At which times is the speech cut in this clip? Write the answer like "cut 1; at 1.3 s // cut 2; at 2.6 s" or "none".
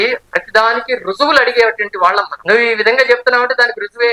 cut 1; at 2.3 s